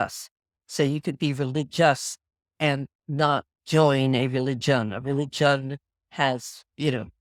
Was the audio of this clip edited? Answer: no; 0 cuts

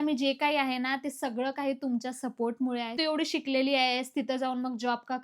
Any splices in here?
yes; 1 cut; at 3.0 s

